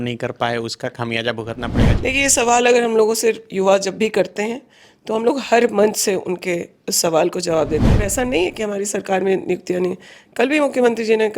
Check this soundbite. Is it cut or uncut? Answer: cut